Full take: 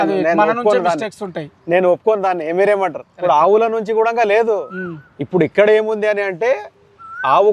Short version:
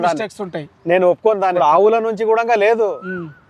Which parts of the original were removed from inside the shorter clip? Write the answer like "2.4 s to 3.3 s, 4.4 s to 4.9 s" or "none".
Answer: 2.4 s to 3.2 s